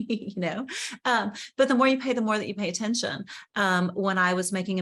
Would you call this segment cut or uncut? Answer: uncut